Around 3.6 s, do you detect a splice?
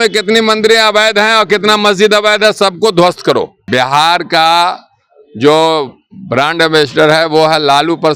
yes; 1 cut; at 3.6 s

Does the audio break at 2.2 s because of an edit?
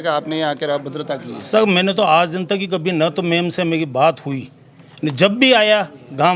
no; 0 cuts

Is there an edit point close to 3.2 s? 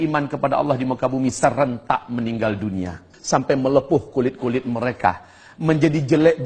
yes; 1 cut; at 3.2 s

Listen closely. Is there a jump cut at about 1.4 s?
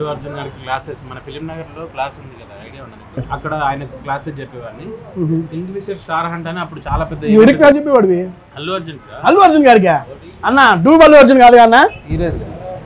no; 1 cut; at 3.3 s

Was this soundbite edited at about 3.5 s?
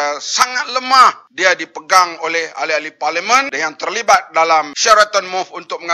yes; 3 cuts; at 1.2 s, 3.5 s, 4.7 s

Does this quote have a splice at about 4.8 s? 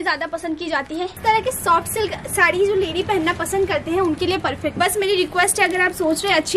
yes; 2 cuts; at 1.2 s, 4.8 s

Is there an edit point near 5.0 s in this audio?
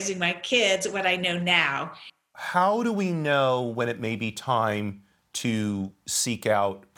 no; 1 cut; at 2.0 s

